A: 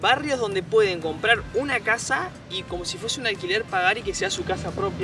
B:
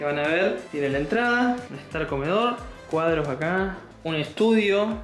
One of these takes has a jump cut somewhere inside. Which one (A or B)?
B